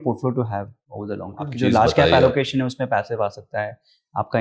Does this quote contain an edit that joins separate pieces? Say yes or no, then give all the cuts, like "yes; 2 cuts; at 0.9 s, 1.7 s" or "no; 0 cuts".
yes; 1 cut; at 1.5 s